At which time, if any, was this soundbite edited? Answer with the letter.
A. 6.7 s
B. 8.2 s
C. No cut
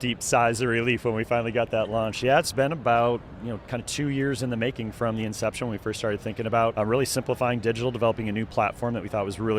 A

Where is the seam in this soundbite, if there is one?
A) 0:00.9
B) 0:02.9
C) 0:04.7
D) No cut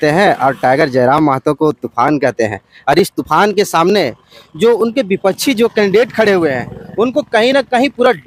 D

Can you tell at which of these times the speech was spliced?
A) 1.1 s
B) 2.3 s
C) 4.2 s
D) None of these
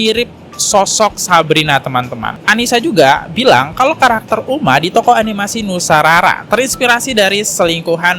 B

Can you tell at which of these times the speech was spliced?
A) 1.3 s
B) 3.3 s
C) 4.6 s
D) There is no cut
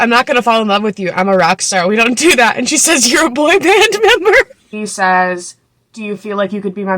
C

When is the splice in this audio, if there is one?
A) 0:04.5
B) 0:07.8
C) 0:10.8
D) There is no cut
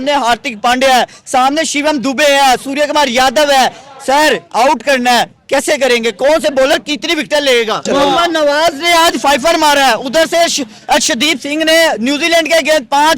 B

